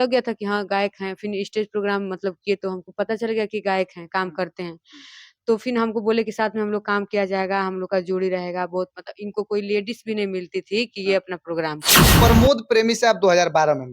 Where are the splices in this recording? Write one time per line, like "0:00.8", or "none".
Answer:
0:12.1